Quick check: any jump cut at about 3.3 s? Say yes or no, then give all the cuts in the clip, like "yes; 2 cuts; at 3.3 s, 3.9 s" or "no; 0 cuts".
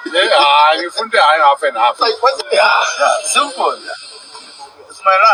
no; 0 cuts